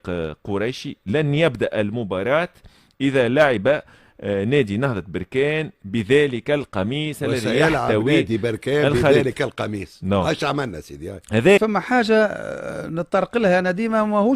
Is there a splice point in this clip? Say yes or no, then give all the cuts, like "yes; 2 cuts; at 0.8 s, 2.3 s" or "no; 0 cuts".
yes; 1 cut; at 11.6 s